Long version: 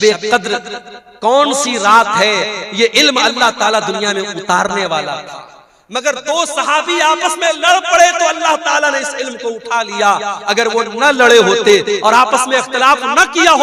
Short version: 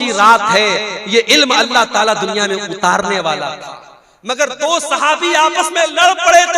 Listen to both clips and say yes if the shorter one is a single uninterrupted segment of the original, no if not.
yes